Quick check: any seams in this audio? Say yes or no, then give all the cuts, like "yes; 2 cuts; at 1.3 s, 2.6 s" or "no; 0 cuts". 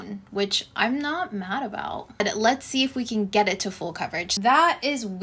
yes; 2 cuts; at 2.2 s, 4.3 s